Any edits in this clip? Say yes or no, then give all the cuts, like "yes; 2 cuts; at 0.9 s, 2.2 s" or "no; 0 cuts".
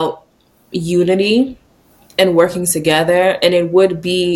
no; 0 cuts